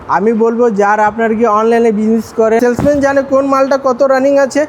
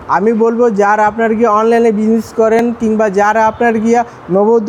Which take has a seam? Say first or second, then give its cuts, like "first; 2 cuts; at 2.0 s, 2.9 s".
first; 1 cut; at 2.6 s